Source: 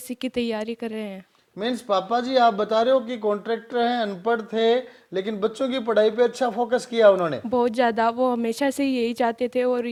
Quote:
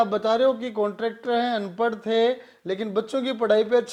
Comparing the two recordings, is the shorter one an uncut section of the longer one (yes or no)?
yes